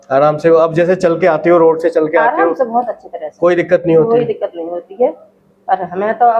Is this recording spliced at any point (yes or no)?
no